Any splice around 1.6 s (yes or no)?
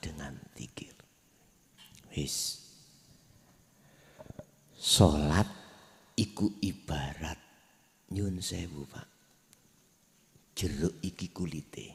no